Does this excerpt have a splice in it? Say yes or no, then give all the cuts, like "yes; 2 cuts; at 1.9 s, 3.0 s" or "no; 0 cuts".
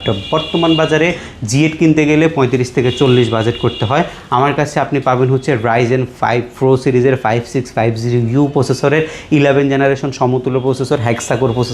no; 0 cuts